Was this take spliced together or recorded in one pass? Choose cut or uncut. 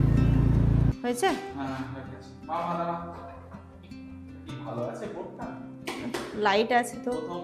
cut